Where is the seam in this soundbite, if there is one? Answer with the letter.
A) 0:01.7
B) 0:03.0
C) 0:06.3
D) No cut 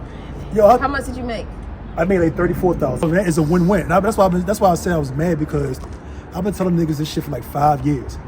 B